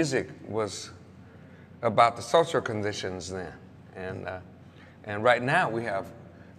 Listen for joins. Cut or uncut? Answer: cut